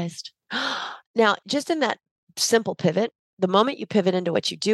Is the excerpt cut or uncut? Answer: uncut